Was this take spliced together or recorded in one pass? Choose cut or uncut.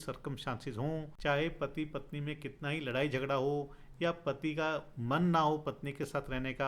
cut